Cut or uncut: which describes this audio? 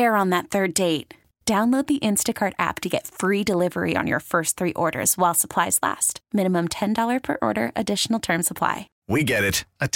cut